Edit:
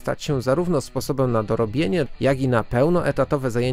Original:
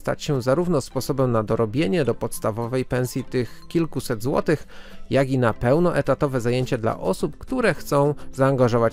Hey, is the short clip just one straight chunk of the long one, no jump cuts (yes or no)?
no